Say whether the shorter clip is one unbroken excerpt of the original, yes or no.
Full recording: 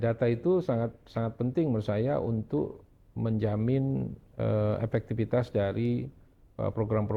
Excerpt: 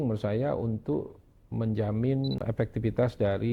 no